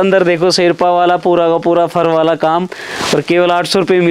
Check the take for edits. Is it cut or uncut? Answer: uncut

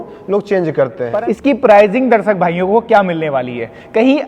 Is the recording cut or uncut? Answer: cut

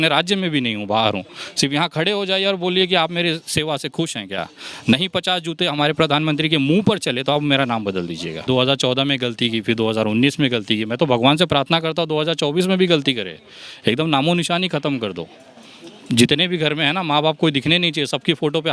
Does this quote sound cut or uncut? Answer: cut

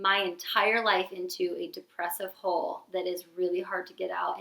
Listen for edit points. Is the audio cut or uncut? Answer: uncut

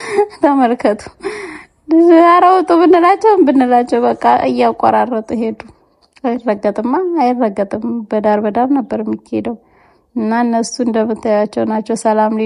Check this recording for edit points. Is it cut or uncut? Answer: uncut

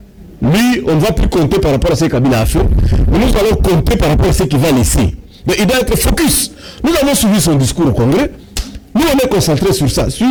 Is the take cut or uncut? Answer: uncut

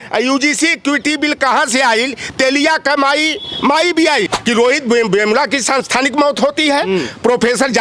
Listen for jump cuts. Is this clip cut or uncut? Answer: cut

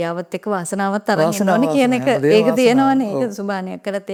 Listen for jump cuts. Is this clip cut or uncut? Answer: uncut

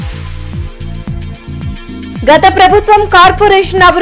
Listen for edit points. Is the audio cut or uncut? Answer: uncut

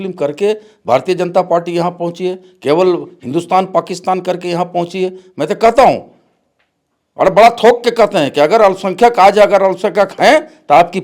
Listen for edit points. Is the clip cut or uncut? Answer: uncut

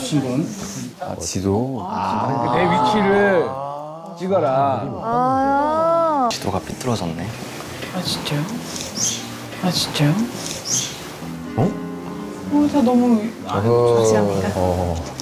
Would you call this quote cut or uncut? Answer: cut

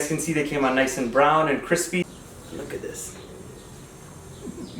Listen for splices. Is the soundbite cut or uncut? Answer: cut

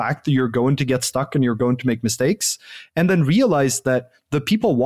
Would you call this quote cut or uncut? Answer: uncut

